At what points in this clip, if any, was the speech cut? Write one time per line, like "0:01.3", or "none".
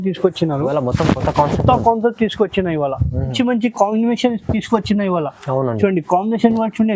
0:03.3